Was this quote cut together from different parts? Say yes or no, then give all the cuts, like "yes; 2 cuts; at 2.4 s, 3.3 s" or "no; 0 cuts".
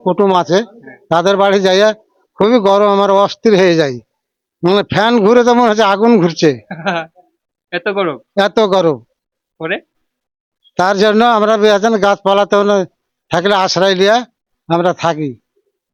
no; 0 cuts